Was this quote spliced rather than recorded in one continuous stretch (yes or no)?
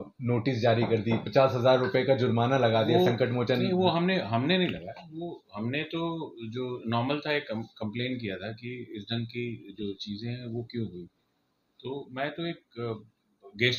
no